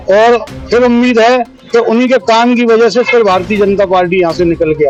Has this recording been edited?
no; 0 cuts

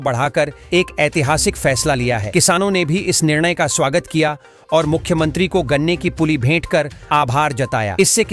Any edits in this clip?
no; 0 cuts

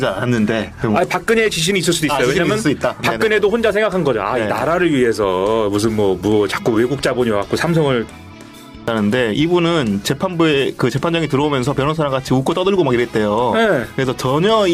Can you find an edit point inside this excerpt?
yes; 1 cut; at 8.6 s

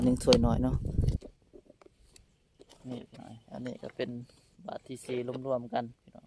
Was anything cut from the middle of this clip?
yes; 1 cut; at 1.2 s

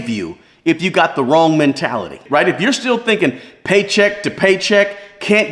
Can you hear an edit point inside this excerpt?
no; 0 cuts

